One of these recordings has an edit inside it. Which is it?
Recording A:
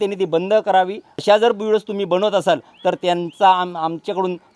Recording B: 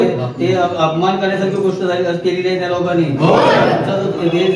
A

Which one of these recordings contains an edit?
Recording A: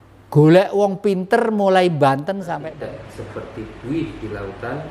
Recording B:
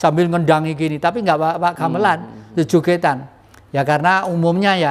A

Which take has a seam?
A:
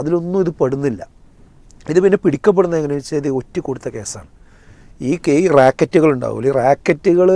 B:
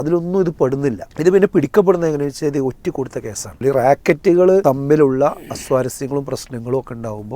B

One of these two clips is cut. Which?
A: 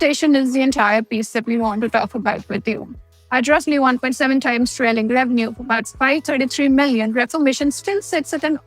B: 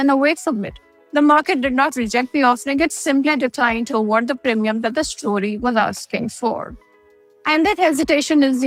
A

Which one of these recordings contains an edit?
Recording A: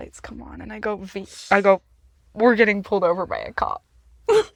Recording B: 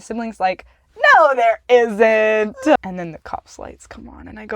B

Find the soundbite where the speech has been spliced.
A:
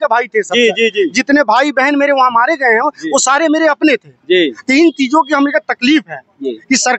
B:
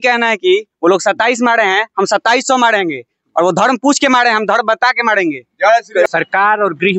B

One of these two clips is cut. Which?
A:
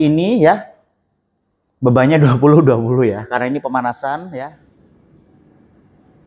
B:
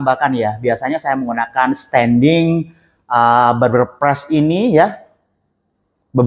A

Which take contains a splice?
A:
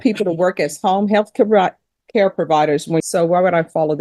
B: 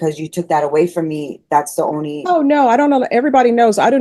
A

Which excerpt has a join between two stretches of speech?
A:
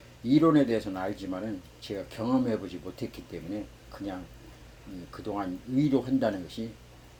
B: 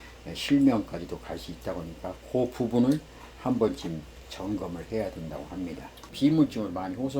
B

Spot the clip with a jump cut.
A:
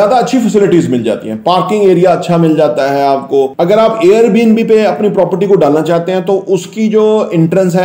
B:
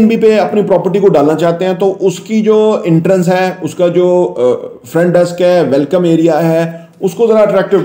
A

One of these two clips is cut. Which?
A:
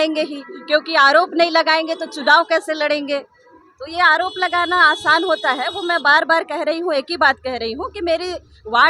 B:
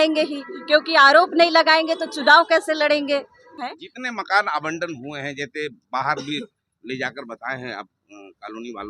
B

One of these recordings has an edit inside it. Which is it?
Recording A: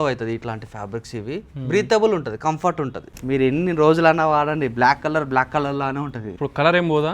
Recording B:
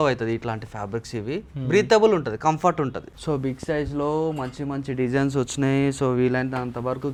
A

